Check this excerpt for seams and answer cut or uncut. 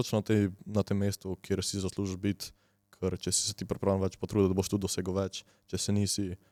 uncut